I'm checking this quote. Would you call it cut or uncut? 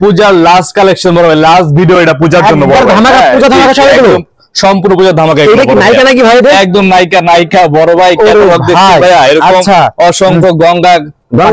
uncut